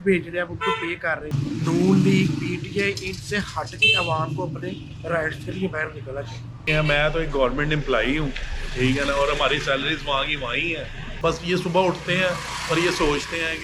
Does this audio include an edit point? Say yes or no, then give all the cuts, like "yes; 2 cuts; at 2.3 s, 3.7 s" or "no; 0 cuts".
yes; 3 cuts; at 1.3 s, 6.6 s, 11.1 s